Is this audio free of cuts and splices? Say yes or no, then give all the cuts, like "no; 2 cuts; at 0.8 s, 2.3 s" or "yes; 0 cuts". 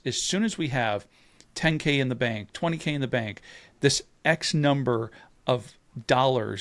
yes; 0 cuts